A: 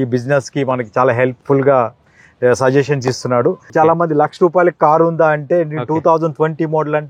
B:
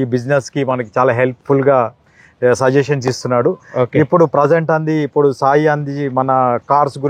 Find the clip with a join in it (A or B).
A